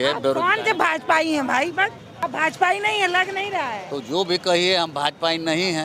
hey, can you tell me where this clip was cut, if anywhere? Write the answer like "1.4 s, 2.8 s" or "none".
2.1 s